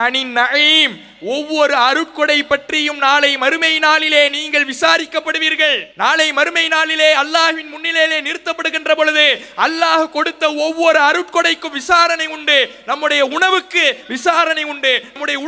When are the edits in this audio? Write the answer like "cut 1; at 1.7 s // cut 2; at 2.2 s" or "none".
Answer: cut 1; at 5.9 s